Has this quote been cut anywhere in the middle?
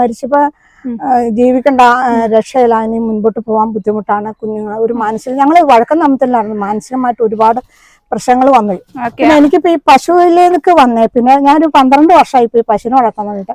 no; 0 cuts

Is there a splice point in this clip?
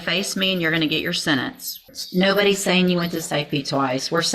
yes; 1 cut; at 1.9 s

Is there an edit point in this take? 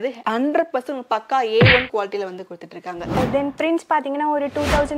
yes; 1 cut; at 3.2 s

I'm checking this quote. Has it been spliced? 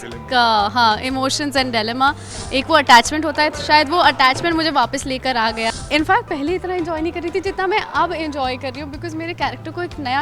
yes; 2 cuts; at 2.3 s, 5.7 s

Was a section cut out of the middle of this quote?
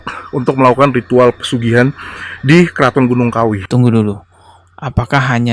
yes; 1 cut; at 3.6 s

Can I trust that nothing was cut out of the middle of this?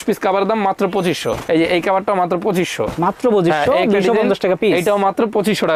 yes; 0 cuts

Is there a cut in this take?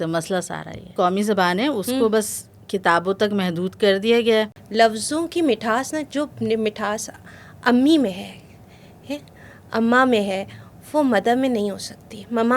yes; 2 cuts; at 0.9 s, 4.6 s

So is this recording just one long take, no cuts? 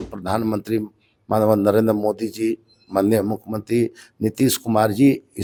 yes; 0 cuts

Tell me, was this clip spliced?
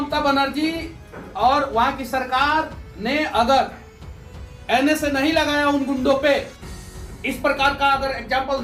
no; 0 cuts

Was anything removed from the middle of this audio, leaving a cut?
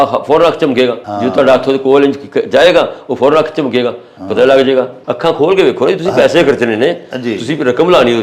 yes; 2 cuts; at 1.1 s, 5.0 s

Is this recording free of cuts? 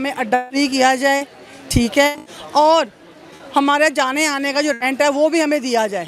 yes; 0 cuts

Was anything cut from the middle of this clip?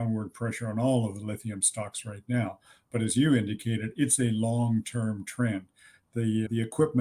no; 0 cuts

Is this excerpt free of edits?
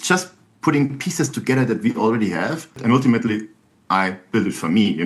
no; 1 cut; at 2.8 s

